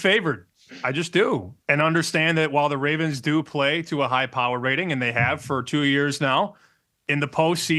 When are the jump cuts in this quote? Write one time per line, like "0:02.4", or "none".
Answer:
0:01.5